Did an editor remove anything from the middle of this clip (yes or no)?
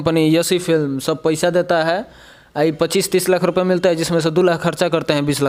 no